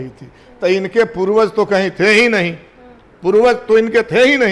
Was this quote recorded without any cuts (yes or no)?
yes